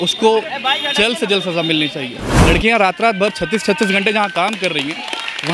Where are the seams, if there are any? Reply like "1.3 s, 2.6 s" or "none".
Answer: 2.2 s